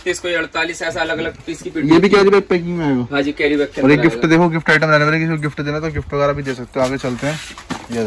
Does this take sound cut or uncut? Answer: uncut